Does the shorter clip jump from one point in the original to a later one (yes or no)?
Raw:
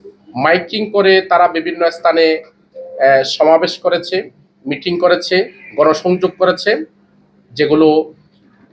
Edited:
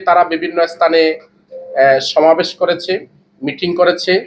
no